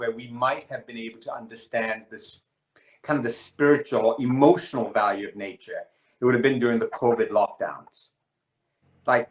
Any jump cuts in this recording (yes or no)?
no